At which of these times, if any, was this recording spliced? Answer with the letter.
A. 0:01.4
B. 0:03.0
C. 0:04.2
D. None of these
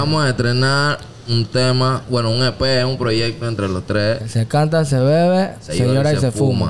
C